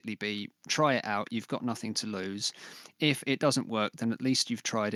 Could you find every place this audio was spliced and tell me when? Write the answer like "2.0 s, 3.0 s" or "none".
none